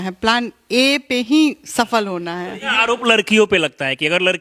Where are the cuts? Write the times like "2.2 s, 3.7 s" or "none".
2.7 s